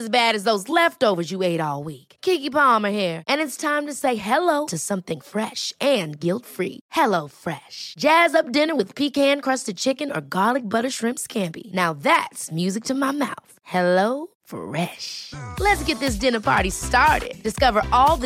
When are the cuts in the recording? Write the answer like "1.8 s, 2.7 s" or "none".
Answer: none